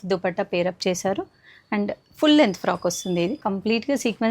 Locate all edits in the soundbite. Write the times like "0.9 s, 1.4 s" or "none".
3.4 s